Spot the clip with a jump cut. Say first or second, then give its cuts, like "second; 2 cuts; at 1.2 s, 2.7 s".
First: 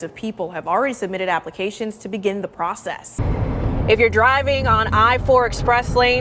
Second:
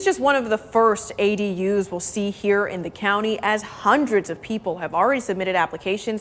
first; 1 cut; at 3.0 s